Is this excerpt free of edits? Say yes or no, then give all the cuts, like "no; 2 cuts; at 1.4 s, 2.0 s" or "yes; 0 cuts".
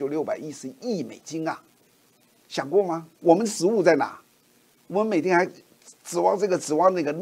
no; 1 cut; at 3.1 s